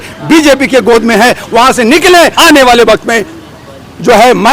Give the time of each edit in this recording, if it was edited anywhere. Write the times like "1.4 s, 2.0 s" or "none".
2.3 s